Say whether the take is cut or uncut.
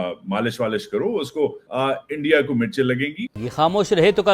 cut